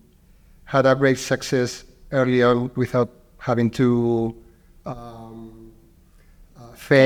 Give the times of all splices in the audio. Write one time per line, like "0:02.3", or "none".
none